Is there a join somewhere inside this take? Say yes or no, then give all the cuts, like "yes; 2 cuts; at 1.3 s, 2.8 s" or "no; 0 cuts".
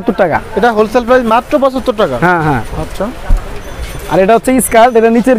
no; 0 cuts